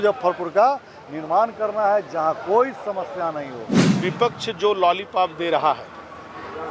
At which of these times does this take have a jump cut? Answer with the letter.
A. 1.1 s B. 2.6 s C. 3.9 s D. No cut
C